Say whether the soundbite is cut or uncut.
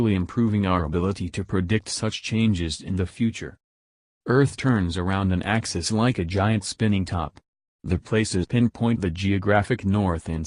uncut